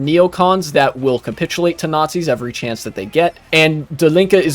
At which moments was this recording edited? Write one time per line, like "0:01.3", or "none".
0:03.5